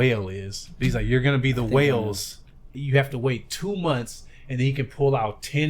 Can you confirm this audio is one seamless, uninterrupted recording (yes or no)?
no